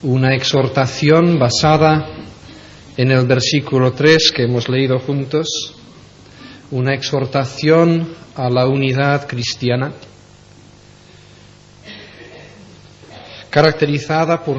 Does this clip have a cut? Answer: no; 0 cuts

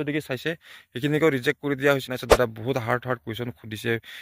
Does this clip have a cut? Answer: yes; 1 cut; at 2.0 s

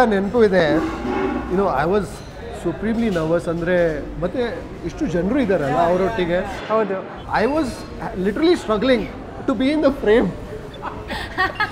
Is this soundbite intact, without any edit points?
yes; 0 cuts

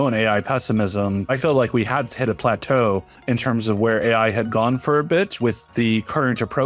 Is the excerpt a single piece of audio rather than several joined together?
no; 2 cuts; at 1.3 s, 5.6 s

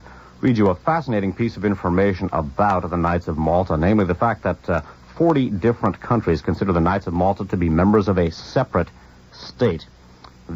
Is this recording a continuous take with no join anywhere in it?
yes; 0 cuts

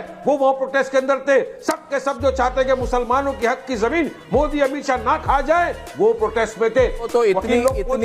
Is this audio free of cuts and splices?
no; 1 cut; at 7.1 s

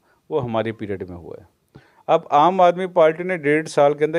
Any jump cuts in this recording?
no; 0 cuts

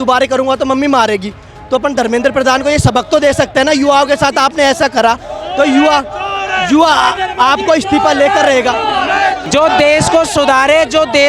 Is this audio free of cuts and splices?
no; 1 cut; at 9.4 s

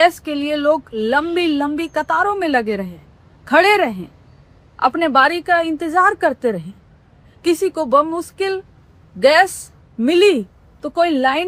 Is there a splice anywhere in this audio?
no; 0 cuts

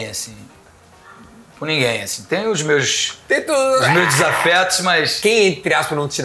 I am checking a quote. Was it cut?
yes; 1 cut; at 5.1 s

